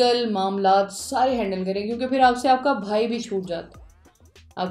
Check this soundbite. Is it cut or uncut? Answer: uncut